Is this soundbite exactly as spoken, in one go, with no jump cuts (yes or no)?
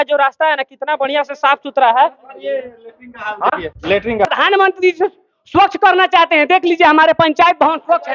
no